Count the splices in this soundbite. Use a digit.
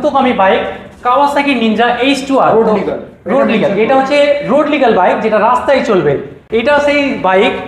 0